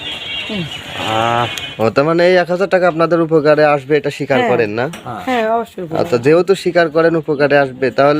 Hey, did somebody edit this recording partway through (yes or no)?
yes